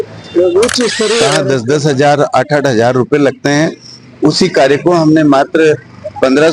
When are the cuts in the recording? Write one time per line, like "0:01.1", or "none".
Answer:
0:01.3